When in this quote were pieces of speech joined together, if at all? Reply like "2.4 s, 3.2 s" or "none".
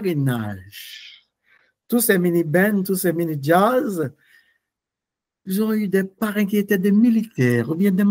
none